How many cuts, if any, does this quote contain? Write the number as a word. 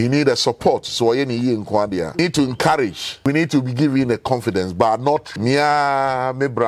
three